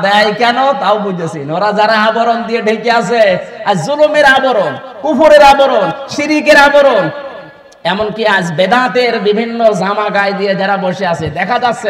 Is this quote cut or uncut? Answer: uncut